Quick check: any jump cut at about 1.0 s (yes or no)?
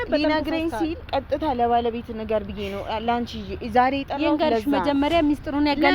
yes